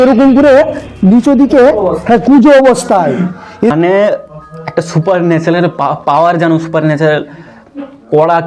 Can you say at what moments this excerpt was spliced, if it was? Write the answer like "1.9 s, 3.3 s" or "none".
3.7 s